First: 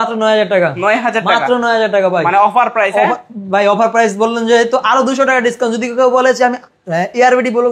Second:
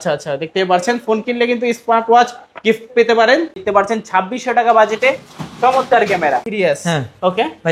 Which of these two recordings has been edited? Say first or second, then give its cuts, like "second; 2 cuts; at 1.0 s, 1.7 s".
second; 2 cuts; at 3.6 s, 6.5 s